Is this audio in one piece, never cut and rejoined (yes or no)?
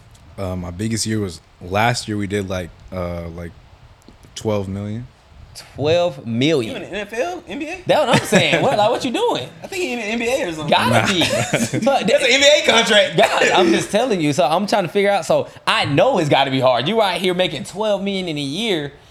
yes